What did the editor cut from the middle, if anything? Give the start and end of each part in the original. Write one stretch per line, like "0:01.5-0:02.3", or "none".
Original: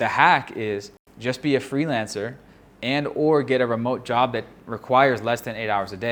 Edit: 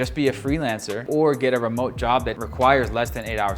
0:02.3-0:03.1
0:04.5-0:04.7